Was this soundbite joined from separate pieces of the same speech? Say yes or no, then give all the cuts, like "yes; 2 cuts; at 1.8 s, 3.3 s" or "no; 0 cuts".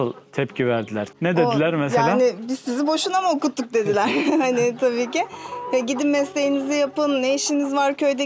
yes; 1 cut; at 1.1 s